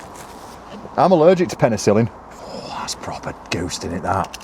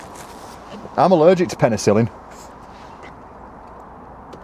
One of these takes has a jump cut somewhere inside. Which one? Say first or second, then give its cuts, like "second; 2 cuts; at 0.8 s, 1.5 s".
first; 1 cut; at 2.3 s